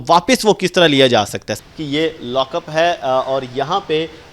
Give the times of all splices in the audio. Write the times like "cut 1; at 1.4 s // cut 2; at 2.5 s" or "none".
cut 1; at 1.5 s